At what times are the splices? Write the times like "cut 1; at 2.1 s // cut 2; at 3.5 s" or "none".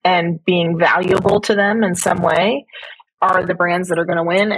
none